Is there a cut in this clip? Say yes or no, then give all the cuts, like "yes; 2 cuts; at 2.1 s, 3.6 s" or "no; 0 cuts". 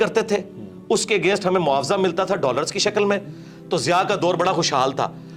no; 0 cuts